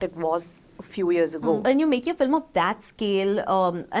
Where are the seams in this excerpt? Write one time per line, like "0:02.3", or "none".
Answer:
0:01.6